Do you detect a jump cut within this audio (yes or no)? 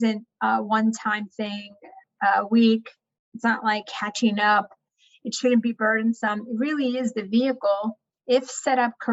no